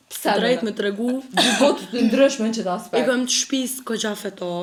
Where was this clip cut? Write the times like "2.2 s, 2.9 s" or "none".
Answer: none